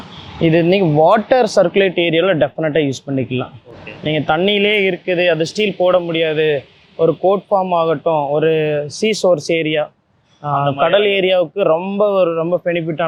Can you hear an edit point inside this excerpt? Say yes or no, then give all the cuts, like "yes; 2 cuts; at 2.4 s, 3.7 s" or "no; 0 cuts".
no; 0 cuts